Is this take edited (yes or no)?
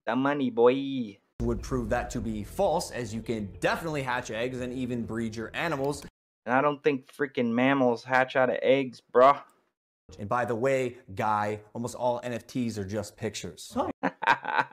no